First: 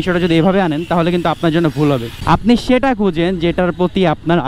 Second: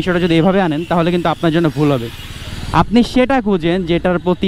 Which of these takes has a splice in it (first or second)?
first